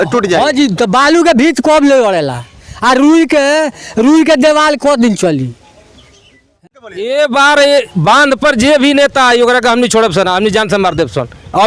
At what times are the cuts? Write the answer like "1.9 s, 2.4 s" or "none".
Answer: 6.6 s